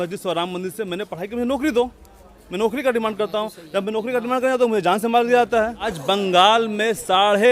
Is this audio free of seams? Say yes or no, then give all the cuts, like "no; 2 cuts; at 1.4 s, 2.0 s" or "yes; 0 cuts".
no; 1 cut; at 5.9 s